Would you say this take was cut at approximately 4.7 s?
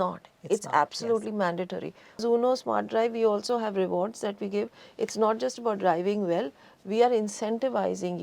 no; 1 cut; at 2.2 s

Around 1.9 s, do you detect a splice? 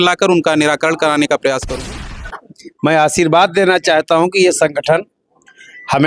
yes; 1 cut; at 1.9 s

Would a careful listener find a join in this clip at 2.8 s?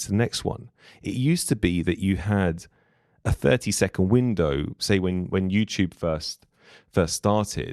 no; 0 cuts

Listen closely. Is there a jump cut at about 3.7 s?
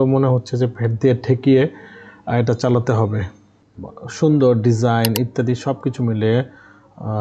yes; 1 cut; at 3.7 s

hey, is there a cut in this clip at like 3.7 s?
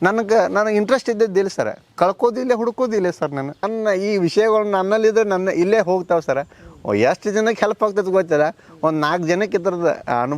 yes; 1 cut; at 3.7 s

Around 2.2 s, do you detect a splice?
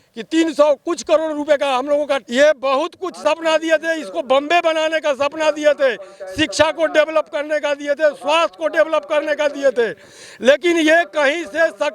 yes; 1 cut; at 2.2 s

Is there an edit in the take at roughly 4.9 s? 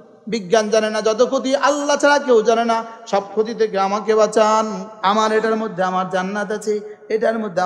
yes; 1 cut; at 4.9 s

